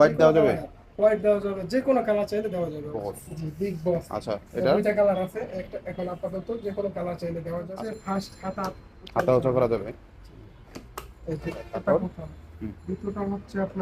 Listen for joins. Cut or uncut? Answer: cut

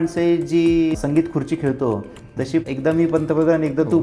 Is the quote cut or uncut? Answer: cut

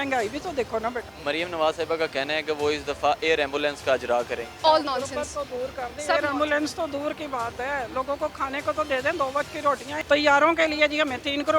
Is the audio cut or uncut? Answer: cut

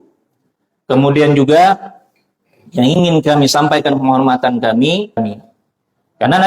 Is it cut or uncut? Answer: cut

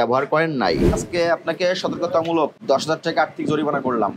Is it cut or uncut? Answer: cut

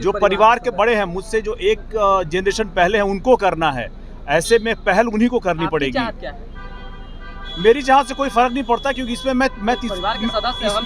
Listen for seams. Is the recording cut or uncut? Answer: uncut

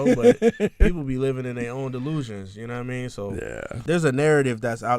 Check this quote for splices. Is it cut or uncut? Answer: cut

